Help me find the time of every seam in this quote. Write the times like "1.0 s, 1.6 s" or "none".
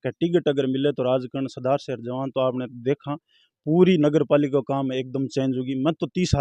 none